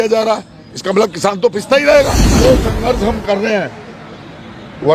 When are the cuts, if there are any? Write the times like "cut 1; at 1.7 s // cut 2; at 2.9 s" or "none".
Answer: cut 1; at 2.4 s

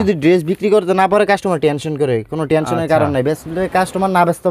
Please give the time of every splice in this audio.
none

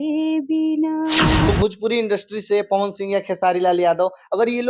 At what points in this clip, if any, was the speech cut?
cut 1; at 1.5 s

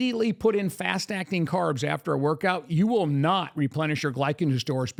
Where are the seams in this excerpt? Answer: none

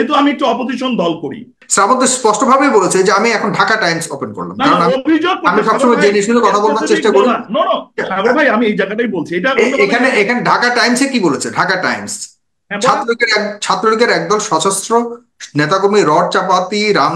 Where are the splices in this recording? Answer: cut 1; at 1.6 s

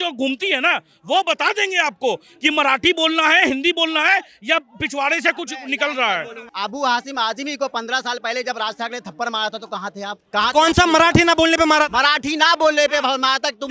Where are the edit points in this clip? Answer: cut 1; at 6.4 s // cut 2; at 10.2 s

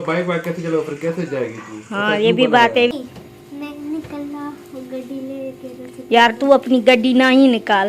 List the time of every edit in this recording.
cut 1; at 2.9 s

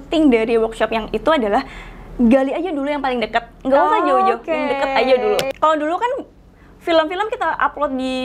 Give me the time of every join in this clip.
cut 1; at 5.5 s

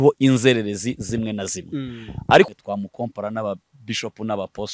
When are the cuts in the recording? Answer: cut 1; at 2.5 s

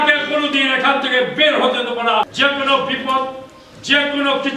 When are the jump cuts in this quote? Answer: cut 1; at 2.3 s

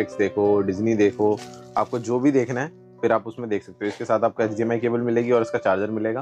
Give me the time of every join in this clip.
none

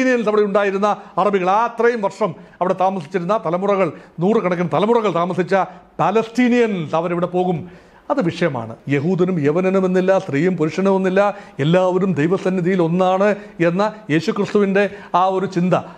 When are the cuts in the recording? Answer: cut 1; at 8.7 s

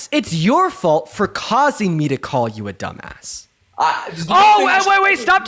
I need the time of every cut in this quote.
none

